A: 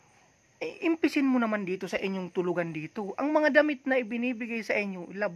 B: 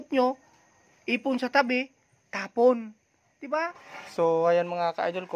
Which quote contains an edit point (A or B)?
B